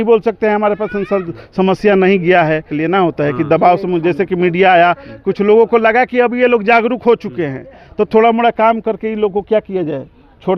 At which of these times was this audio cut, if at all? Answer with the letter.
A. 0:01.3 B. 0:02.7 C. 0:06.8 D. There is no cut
B